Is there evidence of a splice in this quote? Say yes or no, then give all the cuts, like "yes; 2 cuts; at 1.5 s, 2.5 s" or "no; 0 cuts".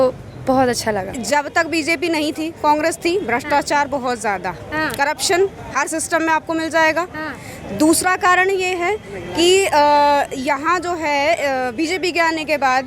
yes; 1 cut; at 1.2 s